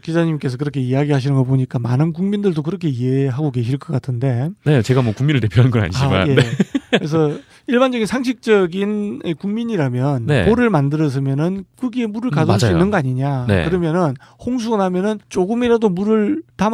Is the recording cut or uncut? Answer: uncut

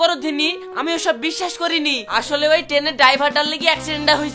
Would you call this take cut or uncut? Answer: uncut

